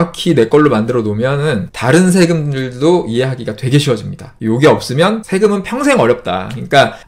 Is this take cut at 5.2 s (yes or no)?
yes